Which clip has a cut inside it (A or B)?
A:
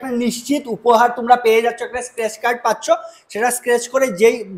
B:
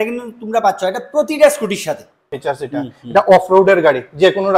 B